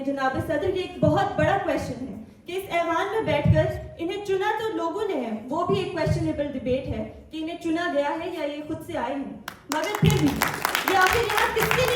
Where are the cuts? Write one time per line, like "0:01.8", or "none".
none